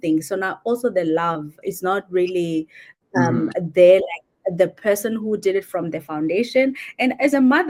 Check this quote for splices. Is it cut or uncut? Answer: uncut